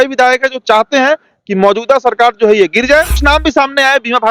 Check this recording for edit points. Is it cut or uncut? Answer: cut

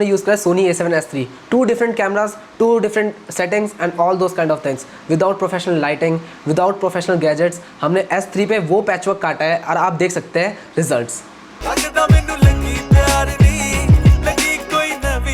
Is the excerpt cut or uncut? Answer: uncut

